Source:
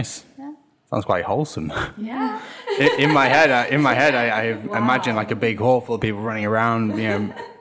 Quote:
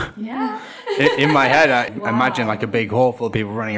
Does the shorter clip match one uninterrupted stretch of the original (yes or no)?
no